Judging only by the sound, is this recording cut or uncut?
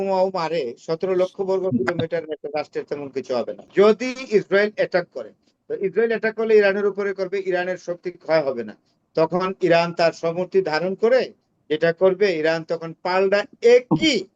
cut